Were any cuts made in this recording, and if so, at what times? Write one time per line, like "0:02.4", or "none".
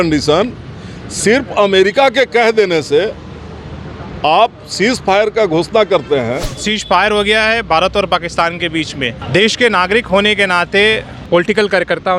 0:06.5
0:09.2
0:11.1